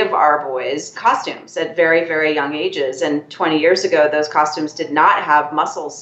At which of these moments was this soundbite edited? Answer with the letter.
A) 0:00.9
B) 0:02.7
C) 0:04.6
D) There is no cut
A